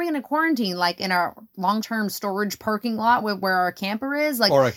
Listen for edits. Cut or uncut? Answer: cut